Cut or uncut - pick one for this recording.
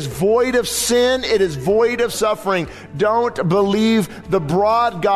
cut